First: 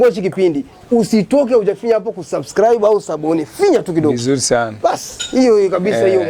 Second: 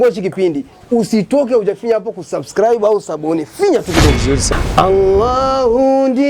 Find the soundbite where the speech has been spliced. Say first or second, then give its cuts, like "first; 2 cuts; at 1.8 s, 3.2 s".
second; 1 cut; at 4.4 s